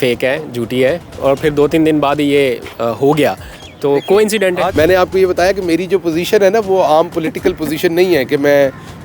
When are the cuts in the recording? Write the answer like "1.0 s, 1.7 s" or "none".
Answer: 4.7 s